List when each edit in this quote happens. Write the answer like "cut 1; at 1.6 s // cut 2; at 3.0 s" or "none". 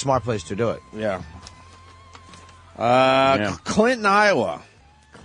cut 1; at 4.2 s

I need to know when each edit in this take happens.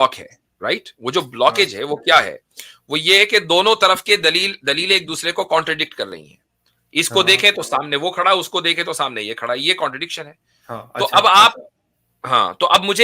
none

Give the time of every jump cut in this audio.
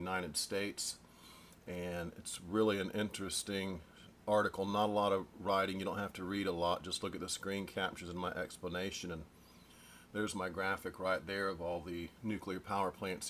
cut 1; at 9.2 s

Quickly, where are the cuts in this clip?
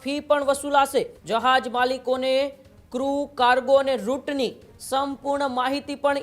cut 1; at 1.2 s

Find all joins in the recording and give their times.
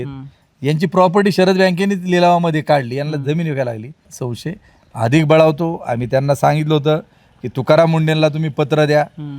cut 1; at 4.2 s

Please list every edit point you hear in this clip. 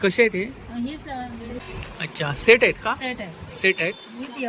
cut 1; at 1.6 s

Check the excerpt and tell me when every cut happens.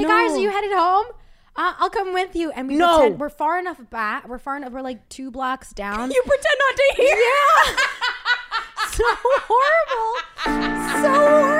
none

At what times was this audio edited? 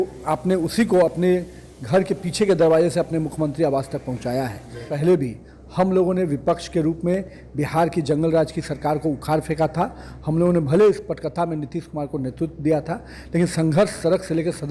cut 1; at 4.9 s

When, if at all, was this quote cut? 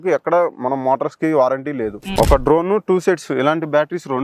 cut 1; at 2.0 s

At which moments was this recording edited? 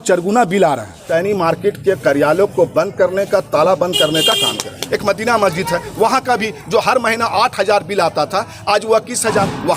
cut 1; at 0.9 s // cut 2; at 4.8 s

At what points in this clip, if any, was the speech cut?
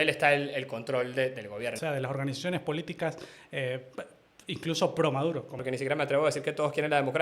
cut 1; at 1.8 s // cut 2; at 5.6 s

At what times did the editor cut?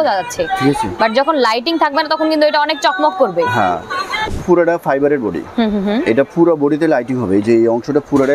cut 1; at 4.3 s

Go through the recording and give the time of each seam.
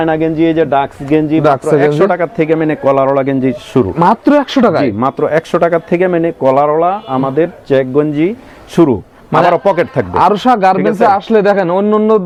none

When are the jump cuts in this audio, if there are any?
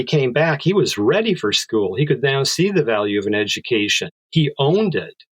cut 1; at 4.1 s

